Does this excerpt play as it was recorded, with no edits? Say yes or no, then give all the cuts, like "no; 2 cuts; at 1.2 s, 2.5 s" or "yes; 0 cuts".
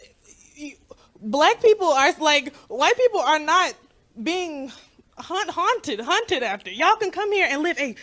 yes; 0 cuts